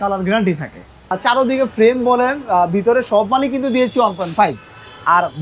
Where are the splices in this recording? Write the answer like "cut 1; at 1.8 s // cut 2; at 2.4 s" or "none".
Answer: cut 1; at 1.2 s